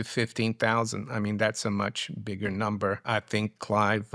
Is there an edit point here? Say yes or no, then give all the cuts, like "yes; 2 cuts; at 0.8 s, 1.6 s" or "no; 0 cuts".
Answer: yes; 1 cut; at 3.0 s